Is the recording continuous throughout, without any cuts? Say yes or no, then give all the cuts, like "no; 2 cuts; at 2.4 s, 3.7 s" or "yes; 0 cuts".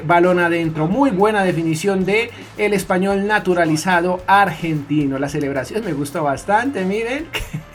yes; 0 cuts